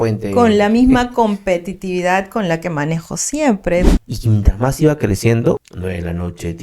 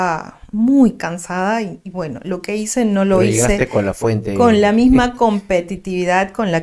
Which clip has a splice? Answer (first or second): first